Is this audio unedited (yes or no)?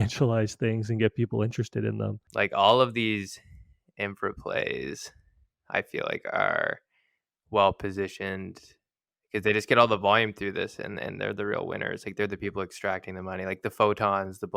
no